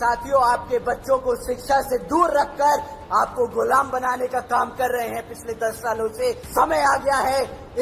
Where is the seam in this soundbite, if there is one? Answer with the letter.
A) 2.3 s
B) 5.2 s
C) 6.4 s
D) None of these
C